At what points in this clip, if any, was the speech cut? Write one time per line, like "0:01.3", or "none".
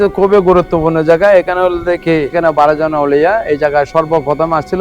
0:02.3